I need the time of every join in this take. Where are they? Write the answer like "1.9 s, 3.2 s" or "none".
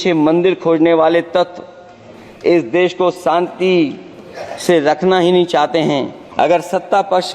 6.2 s